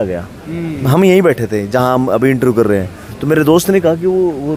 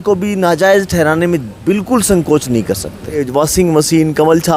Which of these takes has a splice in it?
second; 1 cut; at 3.2 s

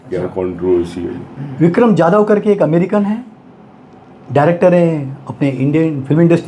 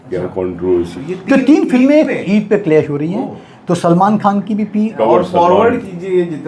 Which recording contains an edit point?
second; 2 cuts; at 1.0 s, 4.9 s

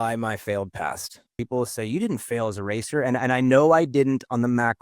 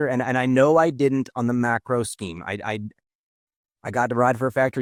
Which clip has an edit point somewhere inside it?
first; 1 cut; at 1.3 s

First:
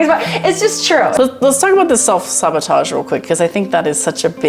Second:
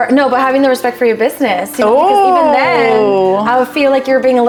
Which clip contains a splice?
first; 1 cut; at 1.1 s

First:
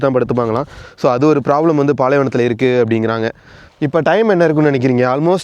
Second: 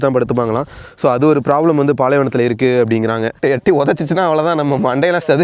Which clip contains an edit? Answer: second; 1 cut; at 3.4 s

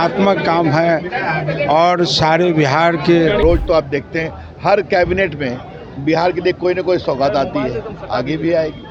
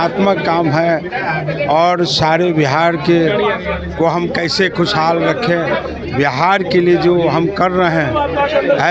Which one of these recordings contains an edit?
first; 1 cut; at 3.4 s

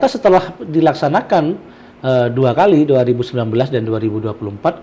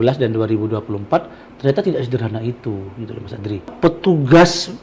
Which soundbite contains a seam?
second; 1 cut; at 3.7 s

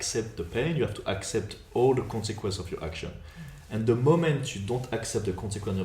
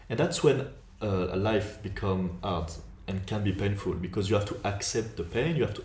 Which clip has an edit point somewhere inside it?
second; 1 cut; at 2.8 s

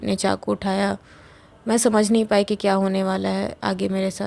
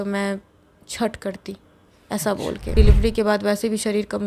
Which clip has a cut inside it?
second; 1 cut; at 2.7 s

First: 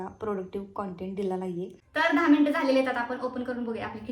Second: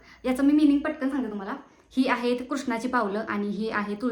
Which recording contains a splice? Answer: first; 1 cut; at 1.7 s

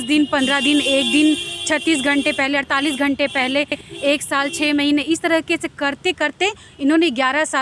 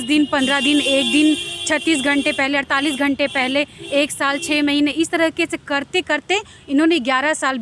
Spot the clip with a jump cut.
second; 1 cut; at 3.8 s

